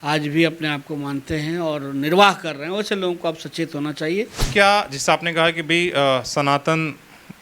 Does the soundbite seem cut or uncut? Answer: cut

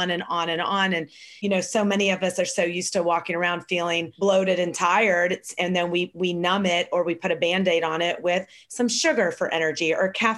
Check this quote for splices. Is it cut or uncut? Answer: cut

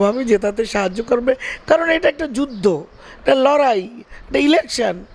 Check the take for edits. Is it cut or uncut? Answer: uncut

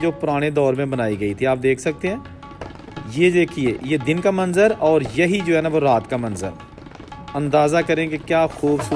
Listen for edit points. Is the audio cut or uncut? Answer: uncut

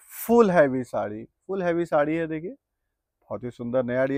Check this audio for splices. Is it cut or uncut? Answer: uncut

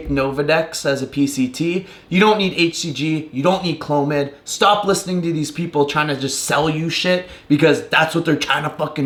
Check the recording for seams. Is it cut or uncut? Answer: uncut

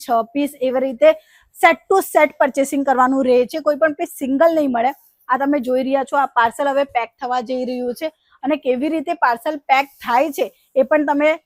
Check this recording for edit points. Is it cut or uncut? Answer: uncut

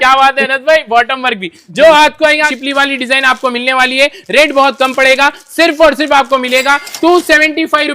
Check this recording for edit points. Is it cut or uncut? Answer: cut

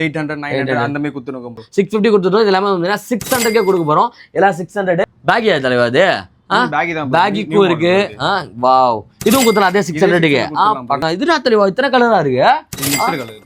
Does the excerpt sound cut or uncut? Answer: cut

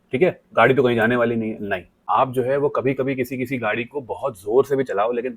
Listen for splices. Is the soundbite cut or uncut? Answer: cut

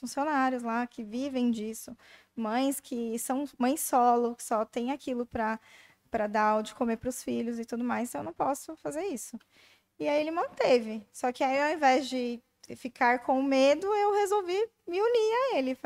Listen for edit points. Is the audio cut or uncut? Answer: uncut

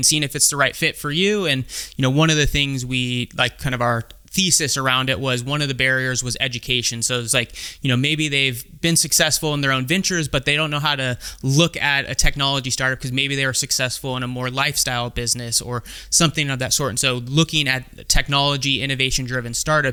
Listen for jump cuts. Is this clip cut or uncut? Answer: uncut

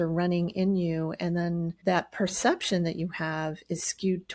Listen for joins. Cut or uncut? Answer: cut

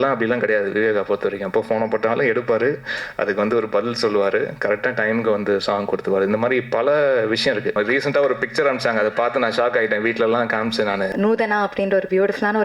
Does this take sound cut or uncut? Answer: cut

